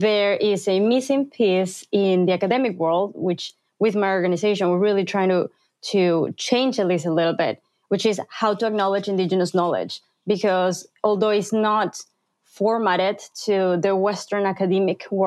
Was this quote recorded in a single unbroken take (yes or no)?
yes